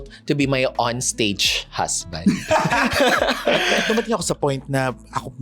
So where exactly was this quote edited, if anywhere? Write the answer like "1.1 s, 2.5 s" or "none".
3.8 s

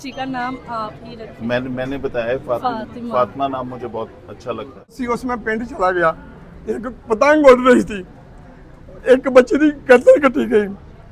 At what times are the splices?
5.0 s

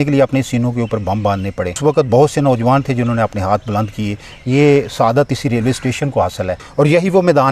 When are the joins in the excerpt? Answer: 1.8 s, 6.6 s

